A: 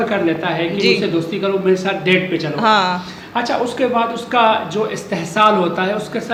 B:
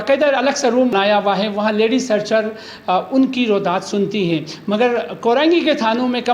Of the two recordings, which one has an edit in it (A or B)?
B